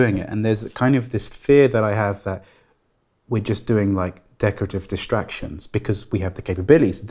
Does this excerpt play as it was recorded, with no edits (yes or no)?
yes